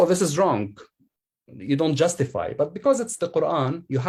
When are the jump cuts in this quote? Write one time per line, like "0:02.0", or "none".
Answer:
none